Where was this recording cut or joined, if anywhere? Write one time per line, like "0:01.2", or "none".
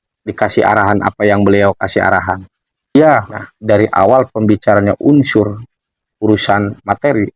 0:02.9